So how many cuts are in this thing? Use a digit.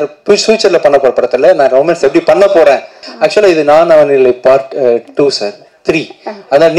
1